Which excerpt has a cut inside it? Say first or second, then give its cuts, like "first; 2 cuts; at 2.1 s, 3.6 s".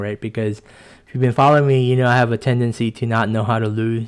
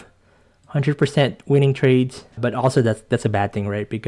second; 1 cut; at 2.2 s